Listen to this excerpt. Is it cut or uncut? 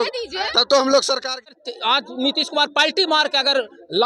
cut